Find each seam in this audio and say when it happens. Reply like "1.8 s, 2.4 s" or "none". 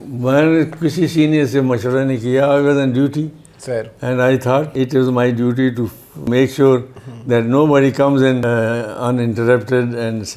4.7 s, 6.3 s, 8.4 s